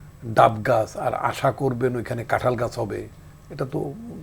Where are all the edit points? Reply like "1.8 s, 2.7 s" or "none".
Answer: none